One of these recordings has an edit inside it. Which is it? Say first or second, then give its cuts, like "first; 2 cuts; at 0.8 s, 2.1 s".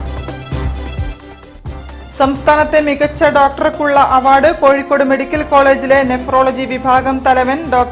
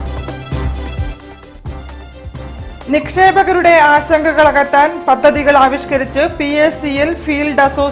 second; 1 cut; at 1.9 s